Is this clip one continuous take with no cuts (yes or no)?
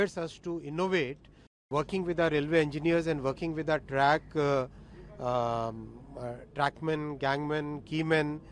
no